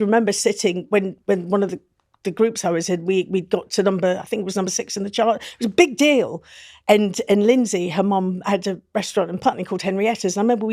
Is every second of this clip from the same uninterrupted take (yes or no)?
yes